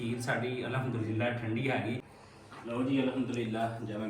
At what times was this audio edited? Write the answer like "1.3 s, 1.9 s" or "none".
2.1 s